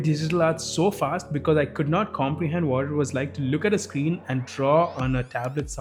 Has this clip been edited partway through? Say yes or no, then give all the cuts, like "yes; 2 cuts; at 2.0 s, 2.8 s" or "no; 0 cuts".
no; 0 cuts